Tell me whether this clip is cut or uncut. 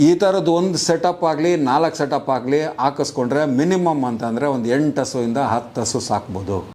uncut